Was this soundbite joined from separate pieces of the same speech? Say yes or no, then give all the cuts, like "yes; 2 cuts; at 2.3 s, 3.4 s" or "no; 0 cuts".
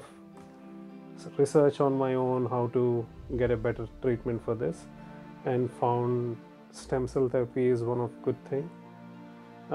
no; 0 cuts